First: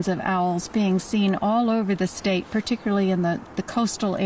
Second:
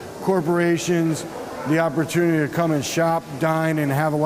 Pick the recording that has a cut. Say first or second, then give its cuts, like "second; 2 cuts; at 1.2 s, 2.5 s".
second; 1 cut; at 1.3 s